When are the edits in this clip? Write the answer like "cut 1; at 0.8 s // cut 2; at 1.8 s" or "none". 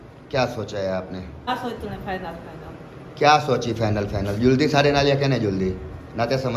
cut 1; at 1.5 s